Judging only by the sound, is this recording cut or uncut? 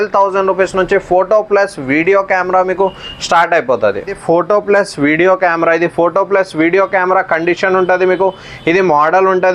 cut